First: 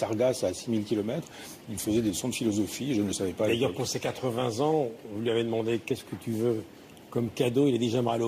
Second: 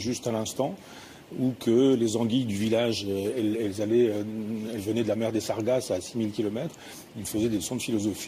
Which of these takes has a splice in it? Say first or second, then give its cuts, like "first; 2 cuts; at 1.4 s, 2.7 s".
second; 1 cut; at 2.3 s